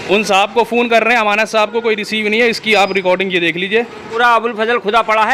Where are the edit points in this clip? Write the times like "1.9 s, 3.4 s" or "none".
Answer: 4.0 s